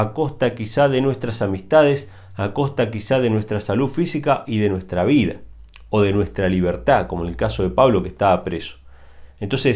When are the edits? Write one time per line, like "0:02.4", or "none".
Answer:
none

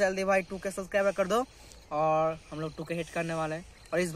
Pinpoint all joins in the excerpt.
none

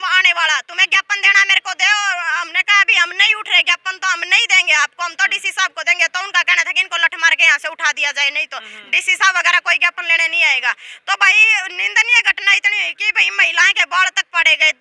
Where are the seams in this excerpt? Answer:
none

